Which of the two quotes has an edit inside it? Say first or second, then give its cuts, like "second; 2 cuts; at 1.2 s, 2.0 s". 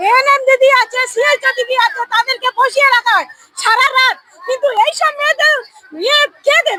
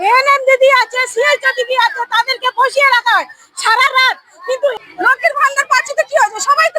second; 1 cut; at 4.7 s